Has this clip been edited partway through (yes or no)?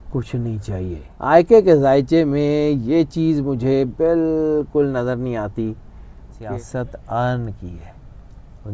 yes